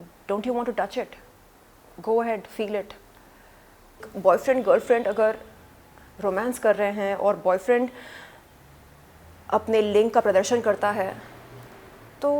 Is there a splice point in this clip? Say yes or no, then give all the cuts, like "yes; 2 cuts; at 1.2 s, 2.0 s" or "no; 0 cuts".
yes; 1 cut; at 4.1 s